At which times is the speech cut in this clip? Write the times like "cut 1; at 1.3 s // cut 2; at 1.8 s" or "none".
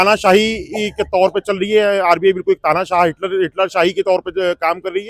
none